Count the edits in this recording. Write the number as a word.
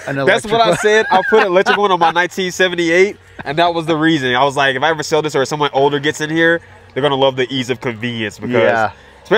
zero